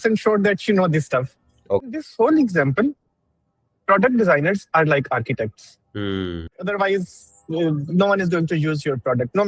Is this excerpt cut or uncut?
cut